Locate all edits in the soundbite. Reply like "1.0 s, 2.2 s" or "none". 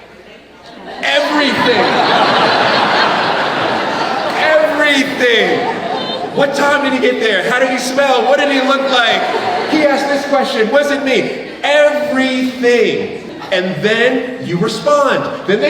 13.3 s